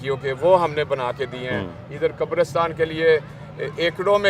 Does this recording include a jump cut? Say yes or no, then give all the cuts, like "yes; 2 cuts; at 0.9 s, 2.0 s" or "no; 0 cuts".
no; 0 cuts